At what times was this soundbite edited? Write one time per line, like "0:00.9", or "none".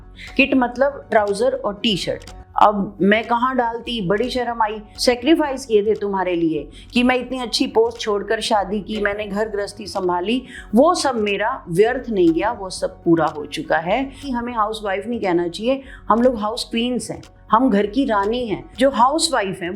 0:04.9
0:14.2
0:18.6